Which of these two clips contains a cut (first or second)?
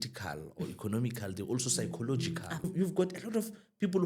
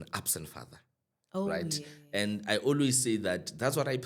first